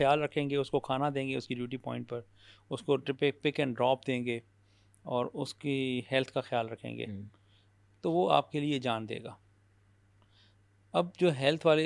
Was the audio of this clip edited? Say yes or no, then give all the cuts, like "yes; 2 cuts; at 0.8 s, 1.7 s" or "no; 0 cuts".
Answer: no; 0 cuts